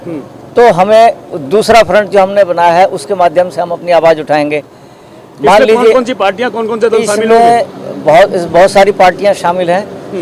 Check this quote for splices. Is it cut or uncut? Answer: uncut